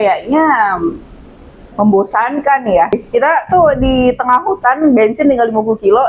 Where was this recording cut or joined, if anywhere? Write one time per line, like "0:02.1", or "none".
0:03.0

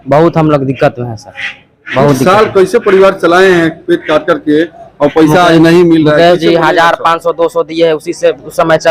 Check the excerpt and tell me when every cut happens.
none

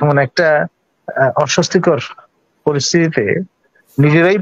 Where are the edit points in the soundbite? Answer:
none

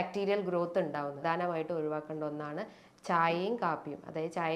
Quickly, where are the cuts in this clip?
0:01.2

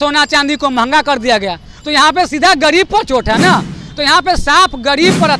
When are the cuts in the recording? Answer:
0:03.8

